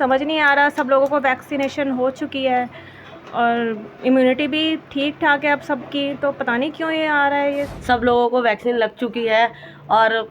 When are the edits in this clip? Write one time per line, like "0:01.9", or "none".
0:07.7